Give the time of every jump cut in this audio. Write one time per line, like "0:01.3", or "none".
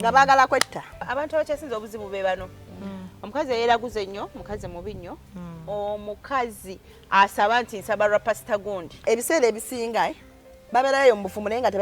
0:01.1
0:09.0